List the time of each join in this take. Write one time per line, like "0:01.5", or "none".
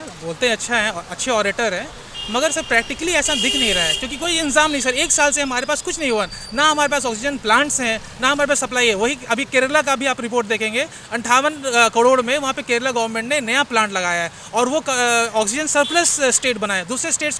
none